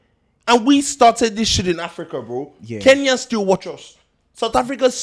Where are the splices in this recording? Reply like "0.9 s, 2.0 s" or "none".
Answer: none